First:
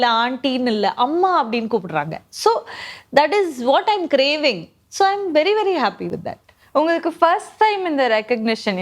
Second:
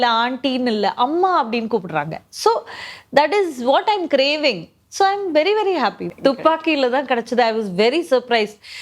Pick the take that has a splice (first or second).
second